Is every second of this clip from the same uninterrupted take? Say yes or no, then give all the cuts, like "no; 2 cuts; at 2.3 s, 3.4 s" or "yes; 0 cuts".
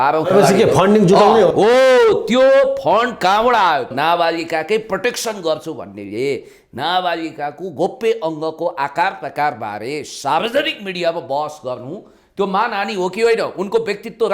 no; 1 cut; at 3.9 s